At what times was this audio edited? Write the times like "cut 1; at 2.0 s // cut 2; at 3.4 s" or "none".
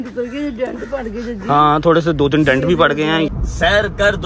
cut 1; at 3.3 s